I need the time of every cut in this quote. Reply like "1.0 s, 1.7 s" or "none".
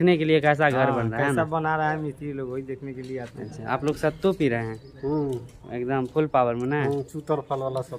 none